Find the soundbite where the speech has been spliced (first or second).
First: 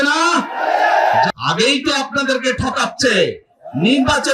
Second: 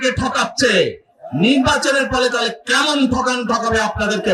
first